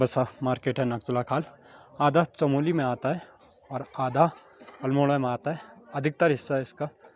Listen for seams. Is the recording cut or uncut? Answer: uncut